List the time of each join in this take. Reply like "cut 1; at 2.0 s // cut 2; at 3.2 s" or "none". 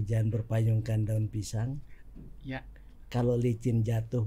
none